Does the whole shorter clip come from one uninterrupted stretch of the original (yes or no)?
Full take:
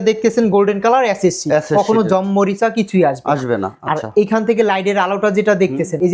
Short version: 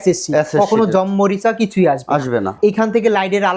no